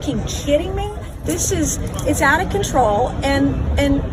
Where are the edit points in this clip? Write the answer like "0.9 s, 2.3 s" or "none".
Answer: none